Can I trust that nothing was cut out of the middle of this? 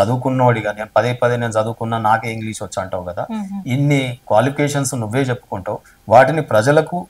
yes; 0 cuts

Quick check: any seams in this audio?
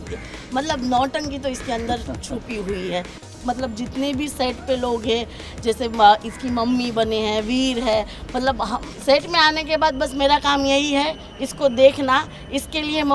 yes; 1 cut; at 3.2 s

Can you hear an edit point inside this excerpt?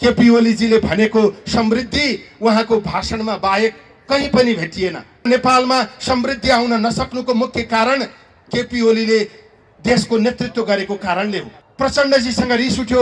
yes; 2 cuts; at 5.3 s, 11.6 s

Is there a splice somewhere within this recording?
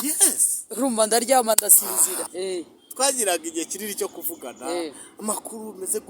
yes; 1 cut; at 2.3 s

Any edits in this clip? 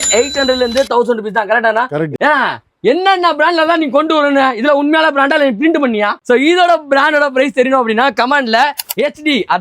yes; 2 cuts; at 2.1 s, 6.2 s

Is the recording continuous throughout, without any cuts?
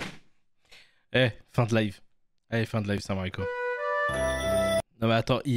yes; 0 cuts

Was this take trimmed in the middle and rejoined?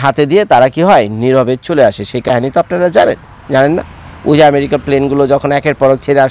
no; 0 cuts

